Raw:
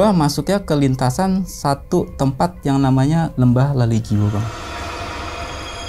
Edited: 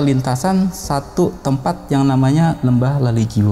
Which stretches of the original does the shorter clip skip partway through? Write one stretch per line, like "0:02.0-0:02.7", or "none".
none